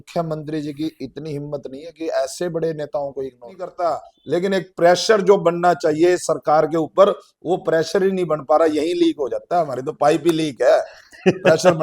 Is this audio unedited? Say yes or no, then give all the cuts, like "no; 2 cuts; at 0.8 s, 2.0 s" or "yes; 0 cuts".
no; 1 cut; at 3.7 s